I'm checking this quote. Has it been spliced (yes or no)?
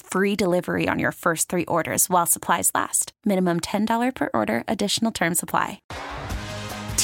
yes